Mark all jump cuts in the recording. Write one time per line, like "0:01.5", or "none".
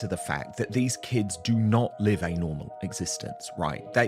none